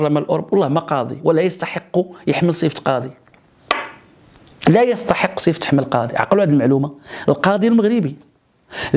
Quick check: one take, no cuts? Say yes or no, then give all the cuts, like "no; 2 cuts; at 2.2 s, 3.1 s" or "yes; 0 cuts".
yes; 0 cuts